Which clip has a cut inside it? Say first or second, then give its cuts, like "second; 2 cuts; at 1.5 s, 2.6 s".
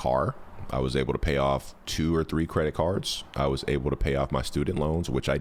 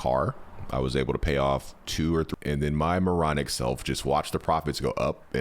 second; 1 cut; at 2.3 s